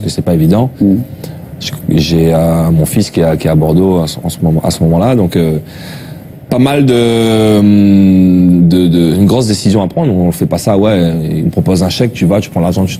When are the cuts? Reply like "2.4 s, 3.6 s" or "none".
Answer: none